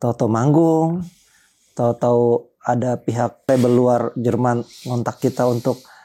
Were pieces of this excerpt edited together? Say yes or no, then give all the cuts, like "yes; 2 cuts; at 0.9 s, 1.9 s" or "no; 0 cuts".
yes; 1 cut; at 3.5 s